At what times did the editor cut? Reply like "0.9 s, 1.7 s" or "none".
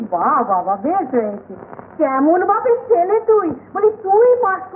none